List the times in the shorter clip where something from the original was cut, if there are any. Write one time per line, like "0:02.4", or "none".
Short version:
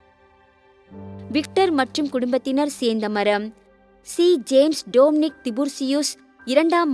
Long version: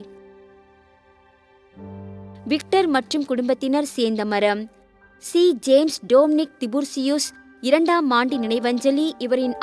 0:01.3

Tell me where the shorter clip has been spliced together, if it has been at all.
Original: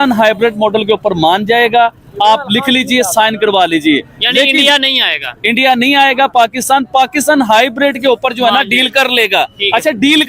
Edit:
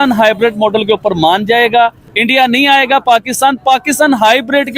0:02.0

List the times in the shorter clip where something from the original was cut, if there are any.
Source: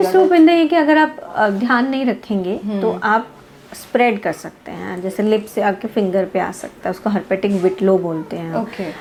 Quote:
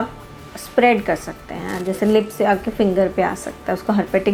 none

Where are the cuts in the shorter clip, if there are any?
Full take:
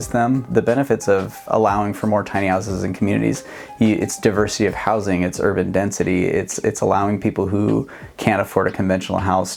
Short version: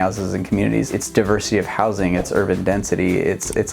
0:01.0

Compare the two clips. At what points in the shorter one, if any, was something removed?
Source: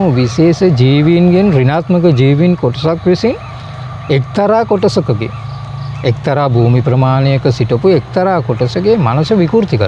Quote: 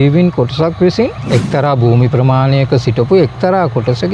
0:01.2

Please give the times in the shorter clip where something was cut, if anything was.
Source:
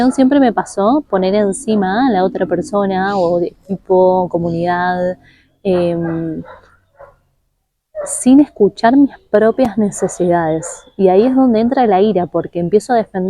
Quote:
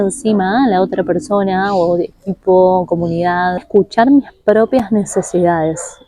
0:03.6

